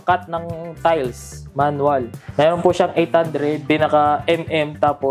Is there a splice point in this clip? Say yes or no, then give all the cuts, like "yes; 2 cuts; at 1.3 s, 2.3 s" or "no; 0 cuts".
yes; 2 cuts; at 2.2 s, 3.6 s